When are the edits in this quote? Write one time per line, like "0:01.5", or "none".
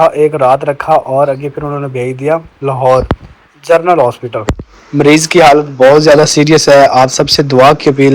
none